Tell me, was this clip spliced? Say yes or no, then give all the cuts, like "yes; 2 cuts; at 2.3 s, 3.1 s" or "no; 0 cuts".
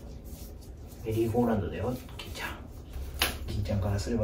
yes; 1 cut; at 3.0 s